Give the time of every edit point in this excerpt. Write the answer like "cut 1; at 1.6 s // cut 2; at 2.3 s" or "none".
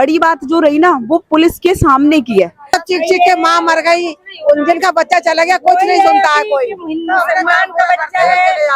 cut 1; at 2.7 s